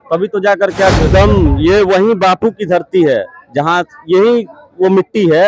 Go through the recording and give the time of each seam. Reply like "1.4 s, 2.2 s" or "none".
1.1 s